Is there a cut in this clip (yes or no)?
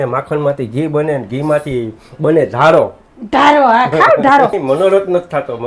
yes